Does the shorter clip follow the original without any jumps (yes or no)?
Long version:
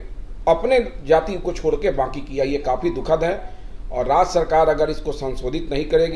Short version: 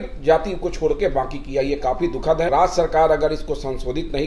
no